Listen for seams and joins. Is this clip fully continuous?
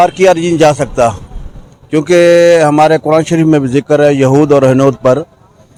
yes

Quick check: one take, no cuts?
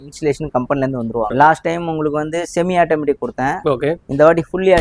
no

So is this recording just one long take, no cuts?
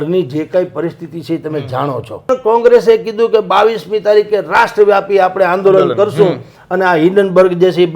no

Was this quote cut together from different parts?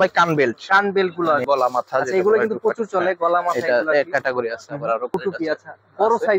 yes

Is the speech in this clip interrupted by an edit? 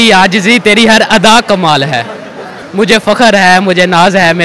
yes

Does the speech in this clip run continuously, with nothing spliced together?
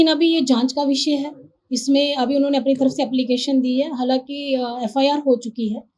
yes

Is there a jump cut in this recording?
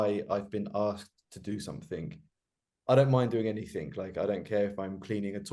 no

